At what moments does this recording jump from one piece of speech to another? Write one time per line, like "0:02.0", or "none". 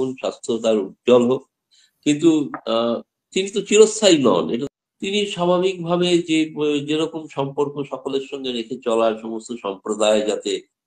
0:04.6